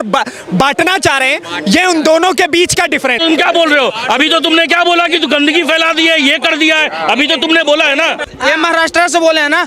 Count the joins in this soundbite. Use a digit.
2